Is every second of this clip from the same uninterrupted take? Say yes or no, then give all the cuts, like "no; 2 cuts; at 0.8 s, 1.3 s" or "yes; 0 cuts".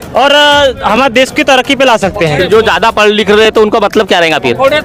yes; 0 cuts